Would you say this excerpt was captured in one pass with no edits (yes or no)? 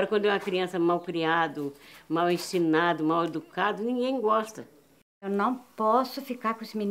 no